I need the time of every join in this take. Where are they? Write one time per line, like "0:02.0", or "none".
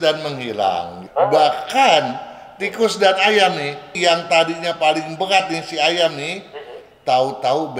0:01.0
0:03.9